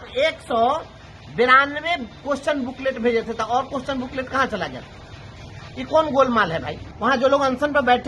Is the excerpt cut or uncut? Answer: cut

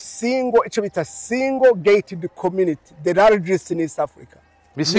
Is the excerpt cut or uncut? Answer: uncut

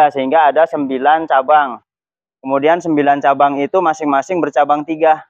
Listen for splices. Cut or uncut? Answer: uncut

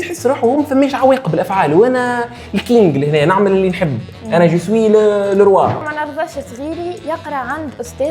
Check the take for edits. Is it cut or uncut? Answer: cut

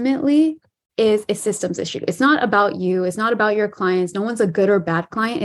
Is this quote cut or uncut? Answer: uncut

